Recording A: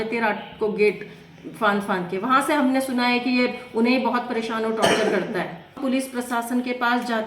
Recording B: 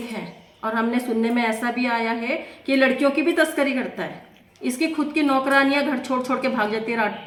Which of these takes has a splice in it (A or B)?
A